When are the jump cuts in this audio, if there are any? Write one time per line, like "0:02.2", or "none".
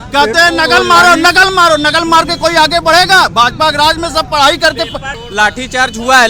0:05.1